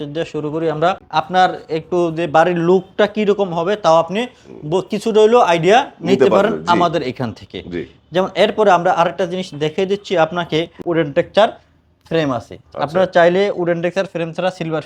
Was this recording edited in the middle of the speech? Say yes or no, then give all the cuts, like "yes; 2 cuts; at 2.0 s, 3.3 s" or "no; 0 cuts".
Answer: yes; 2 cuts; at 1.0 s, 10.8 s